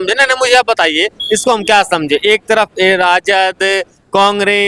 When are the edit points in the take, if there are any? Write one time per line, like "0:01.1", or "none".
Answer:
none